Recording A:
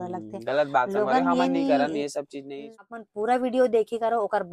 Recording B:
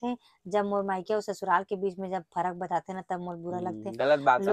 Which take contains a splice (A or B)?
A